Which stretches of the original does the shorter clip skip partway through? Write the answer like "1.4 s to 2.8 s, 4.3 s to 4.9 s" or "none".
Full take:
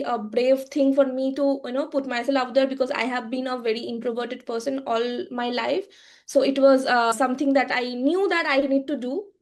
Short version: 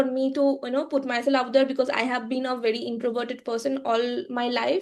none